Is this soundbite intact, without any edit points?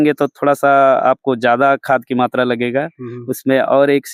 yes; 0 cuts

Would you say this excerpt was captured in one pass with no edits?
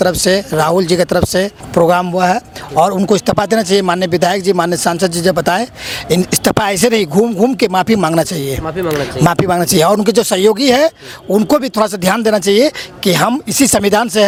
yes; 0 cuts

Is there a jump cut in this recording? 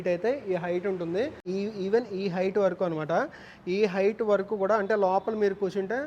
yes; 1 cut; at 1.4 s

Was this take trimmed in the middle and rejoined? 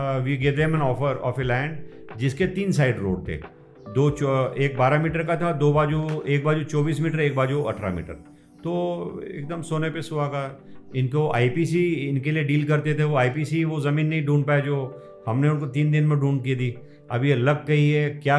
no; 0 cuts

